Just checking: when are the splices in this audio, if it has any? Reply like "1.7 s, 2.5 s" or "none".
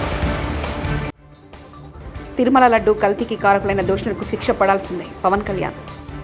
1.2 s